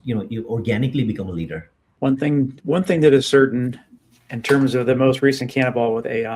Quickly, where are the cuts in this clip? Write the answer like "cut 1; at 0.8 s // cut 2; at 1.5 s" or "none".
cut 1; at 1.9 s